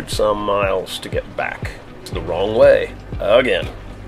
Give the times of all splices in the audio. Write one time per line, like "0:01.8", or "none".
0:02.0